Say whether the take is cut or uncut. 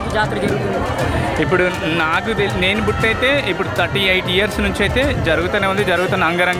uncut